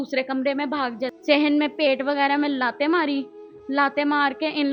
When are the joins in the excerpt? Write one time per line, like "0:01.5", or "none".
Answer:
0:01.1